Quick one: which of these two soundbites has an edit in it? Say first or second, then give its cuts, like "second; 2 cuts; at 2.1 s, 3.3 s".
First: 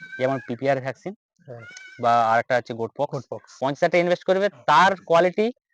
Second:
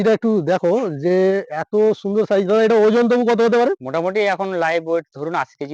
first; 1 cut; at 3.5 s